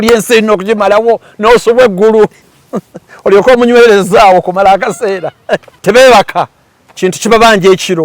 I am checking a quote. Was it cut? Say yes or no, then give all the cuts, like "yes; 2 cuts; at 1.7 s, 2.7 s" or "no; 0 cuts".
yes; 1 cut; at 5.7 s